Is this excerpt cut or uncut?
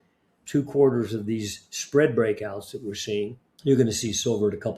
cut